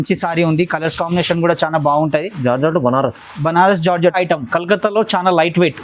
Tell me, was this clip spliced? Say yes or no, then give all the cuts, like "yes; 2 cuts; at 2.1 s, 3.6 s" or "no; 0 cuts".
yes; 1 cut; at 4.1 s